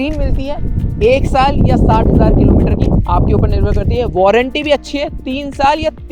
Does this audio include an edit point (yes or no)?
no